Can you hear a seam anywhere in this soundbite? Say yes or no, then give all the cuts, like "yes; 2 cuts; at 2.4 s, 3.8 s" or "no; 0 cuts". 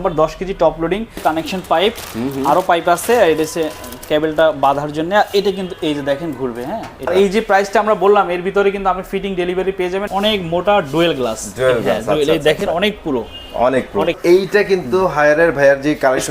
yes; 4 cuts; at 1.1 s, 7.1 s, 10.1 s, 14.2 s